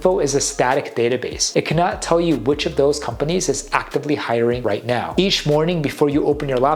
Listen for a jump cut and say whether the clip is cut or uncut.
cut